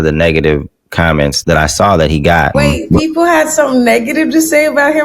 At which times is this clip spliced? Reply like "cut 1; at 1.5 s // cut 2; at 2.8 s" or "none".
cut 1; at 1.4 s // cut 2; at 2.5 s

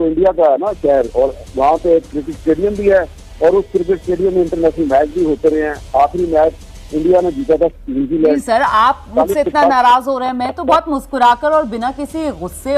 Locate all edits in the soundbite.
none

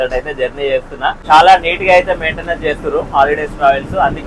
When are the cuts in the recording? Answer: cut 1; at 1.1 s

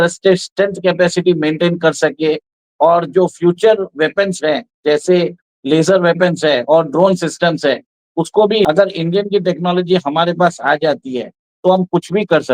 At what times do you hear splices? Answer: cut 1; at 8.7 s

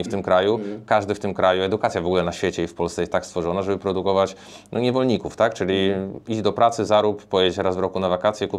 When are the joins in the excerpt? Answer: none

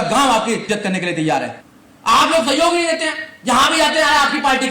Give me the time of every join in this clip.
cut 1; at 1.6 s

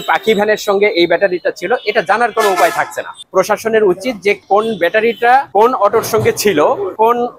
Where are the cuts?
none

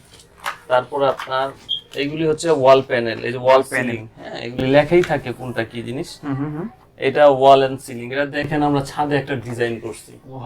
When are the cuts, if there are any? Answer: none

